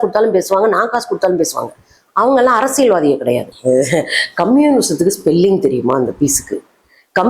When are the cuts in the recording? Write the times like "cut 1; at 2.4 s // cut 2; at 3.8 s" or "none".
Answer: cut 1; at 3.5 s